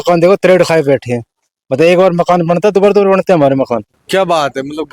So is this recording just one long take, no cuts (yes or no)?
no